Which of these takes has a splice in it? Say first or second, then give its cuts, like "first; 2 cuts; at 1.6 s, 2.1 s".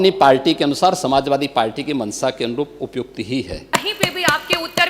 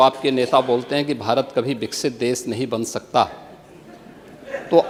first; 1 cut; at 3.7 s